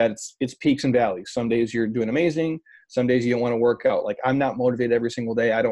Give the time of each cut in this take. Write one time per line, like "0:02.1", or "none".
none